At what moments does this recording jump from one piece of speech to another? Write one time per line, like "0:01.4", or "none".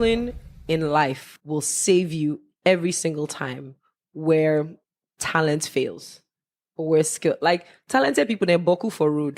0:01.3